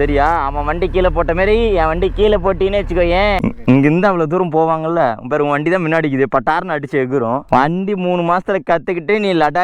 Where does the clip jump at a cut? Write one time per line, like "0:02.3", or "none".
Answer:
0:03.4
0:07.4